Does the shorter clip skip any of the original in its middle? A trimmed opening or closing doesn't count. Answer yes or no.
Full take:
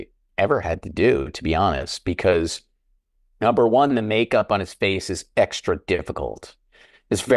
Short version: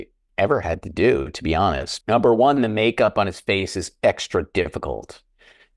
yes